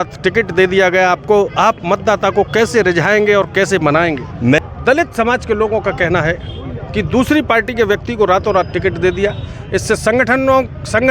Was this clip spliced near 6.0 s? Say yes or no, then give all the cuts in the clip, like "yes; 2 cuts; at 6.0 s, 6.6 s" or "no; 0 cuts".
no; 1 cut; at 4.6 s